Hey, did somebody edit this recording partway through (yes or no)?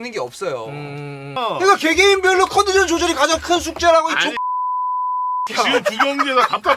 yes